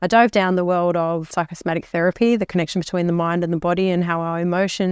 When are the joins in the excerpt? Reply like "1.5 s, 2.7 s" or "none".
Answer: 1.3 s

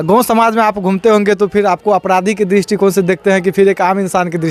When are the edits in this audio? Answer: none

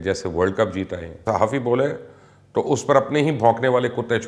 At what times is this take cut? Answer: 1.2 s

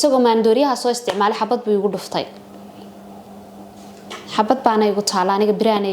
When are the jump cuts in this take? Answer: none

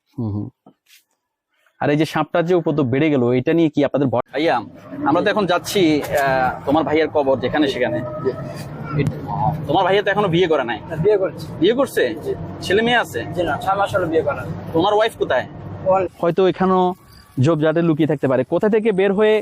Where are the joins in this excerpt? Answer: 4.2 s, 9.1 s, 16.1 s

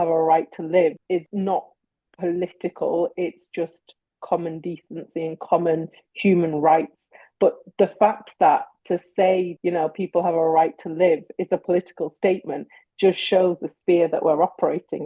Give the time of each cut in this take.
1.0 s, 9.5 s

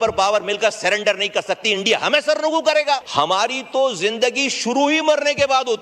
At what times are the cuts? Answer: 3.1 s

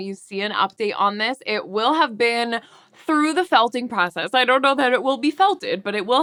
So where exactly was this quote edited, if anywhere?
none

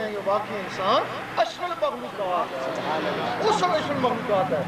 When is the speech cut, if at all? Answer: none

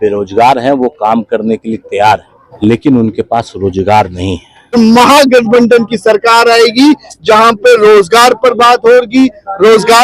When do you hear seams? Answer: 2.4 s, 4.7 s

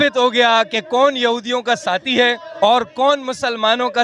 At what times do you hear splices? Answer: 2.5 s

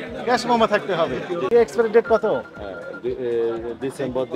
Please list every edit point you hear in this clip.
1.5 s

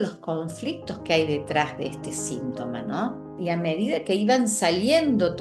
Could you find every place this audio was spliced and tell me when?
3.4 s

